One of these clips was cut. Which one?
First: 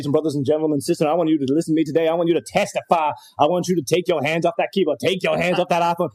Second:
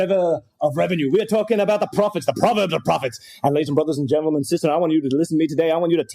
second; 1 cut; at 2.2 s

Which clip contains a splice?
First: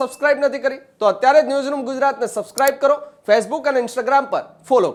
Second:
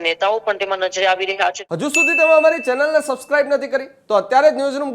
second; 1 cut; at 1.6 s

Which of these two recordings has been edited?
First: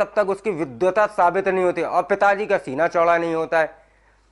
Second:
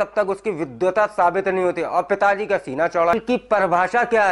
second; 1 cut; at 3.1 s

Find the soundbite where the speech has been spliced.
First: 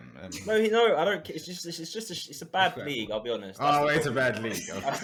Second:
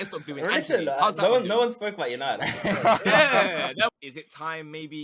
second; 1 cut; at 3.9 s

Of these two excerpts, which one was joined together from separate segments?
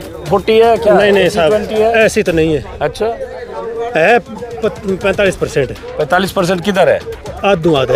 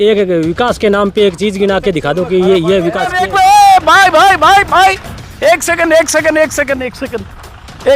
second; 1 cut; at 3.1 s

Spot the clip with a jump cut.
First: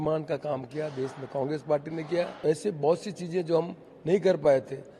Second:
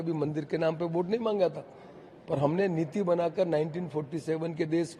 first; 1 cut; at 2.3 s

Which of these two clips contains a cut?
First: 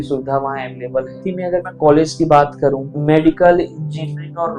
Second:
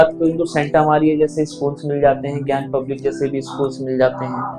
first; 2 cuts; at 1.2 s, 2.9 s

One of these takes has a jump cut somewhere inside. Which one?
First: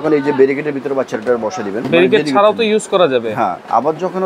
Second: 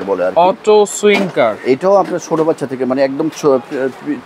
first; 1 cut; at 1.9 s

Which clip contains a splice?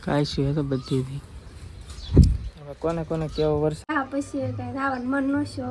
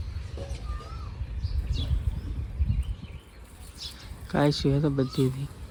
first; 1 cut; at 3.8 s

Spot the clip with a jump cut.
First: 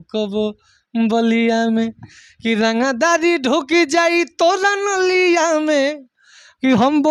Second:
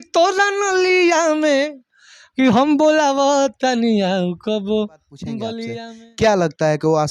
second; 1 cut; at 5.7 s

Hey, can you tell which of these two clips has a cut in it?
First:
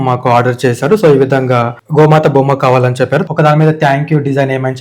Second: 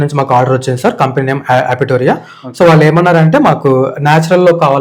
first; 2 cuts; at 1.8 s, 3.2 s

